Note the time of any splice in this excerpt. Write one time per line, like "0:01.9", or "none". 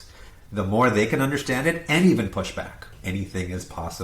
0:02.9